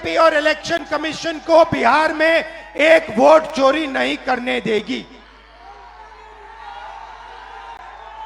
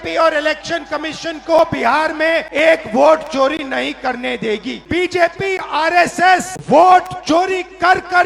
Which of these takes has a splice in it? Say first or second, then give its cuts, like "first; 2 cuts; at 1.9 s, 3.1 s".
second; 3 cuts; at 2.5 s, 4.9 s, 6.5 s